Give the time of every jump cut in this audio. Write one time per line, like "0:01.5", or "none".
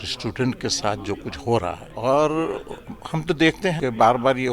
0:01.9
0:03.8